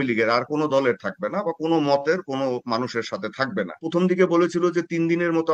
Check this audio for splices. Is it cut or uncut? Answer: cut